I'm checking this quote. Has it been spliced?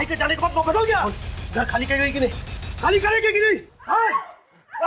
yes; 1 cut; at 1.1 s

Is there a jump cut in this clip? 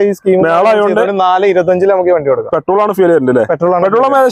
no; 0 cuts

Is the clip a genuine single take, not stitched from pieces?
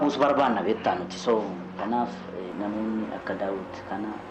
no; 1 cut; at 2.5 s

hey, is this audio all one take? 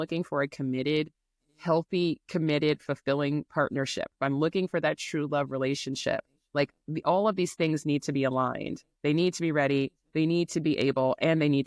yes; 0 cuts

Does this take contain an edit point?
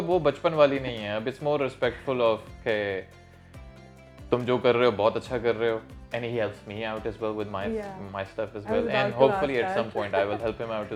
no; 0 cuts

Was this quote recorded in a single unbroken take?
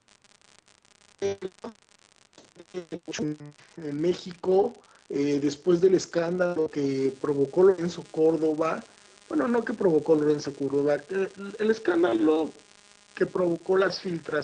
no; 1 cut; at 9.9 s

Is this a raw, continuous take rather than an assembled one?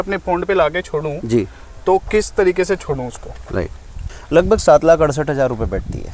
no; 1 cut; at 4.0 s

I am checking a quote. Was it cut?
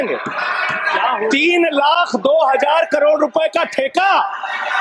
no; 0 cuts

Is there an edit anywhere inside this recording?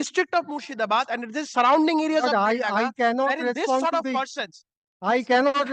no; 0 cuts

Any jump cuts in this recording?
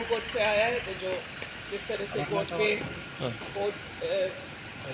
no; 0 cuts

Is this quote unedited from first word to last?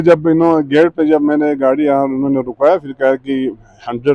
yes; 0 cuts

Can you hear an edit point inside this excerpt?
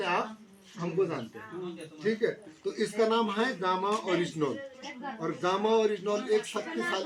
no; 0 cuts

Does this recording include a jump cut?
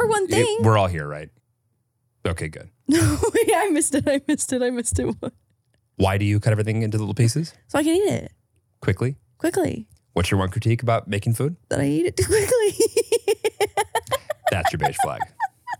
yes; 1 cut; at 1.3 s

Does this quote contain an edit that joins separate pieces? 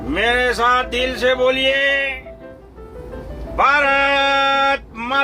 yes; 1 cut; at 2.5 s

